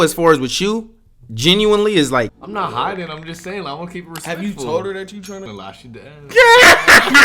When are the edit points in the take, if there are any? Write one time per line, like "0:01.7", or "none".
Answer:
0:02.4
0:05.5